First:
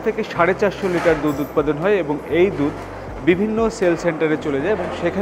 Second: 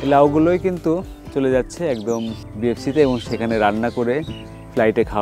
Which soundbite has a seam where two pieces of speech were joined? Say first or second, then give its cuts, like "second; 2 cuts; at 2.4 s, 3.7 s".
second; 1 cut; at 2.4 s